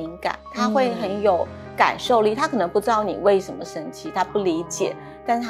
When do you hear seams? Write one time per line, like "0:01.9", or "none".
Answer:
none